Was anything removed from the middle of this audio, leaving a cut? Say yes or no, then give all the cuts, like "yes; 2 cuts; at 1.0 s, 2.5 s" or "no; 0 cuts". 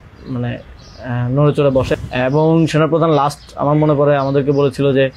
yes; 1 cut; at 1.9 s